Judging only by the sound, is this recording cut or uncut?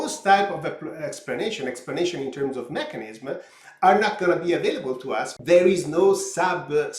cut